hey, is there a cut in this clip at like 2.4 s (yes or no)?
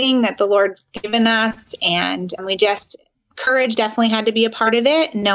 yes